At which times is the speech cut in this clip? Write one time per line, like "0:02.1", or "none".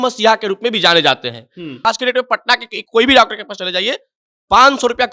0:01.8